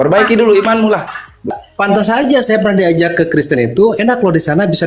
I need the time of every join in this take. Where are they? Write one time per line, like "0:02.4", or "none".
0:01.5